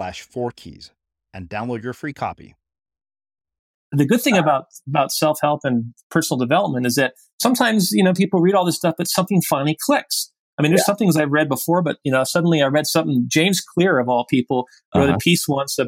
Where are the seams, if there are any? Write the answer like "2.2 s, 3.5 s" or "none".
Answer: 3.8 s